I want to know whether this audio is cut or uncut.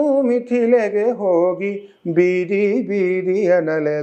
uncut